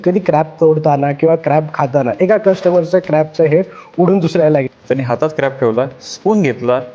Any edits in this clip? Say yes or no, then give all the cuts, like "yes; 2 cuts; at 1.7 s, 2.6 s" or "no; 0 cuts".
yes; 1 cut; at 4.7 s